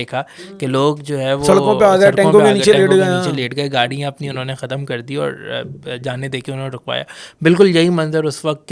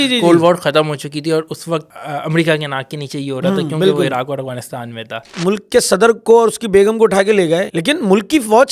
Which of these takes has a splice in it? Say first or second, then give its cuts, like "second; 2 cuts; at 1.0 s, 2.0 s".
second; 3 cuts; at 1.9 s, 5.3 s, 7.7 s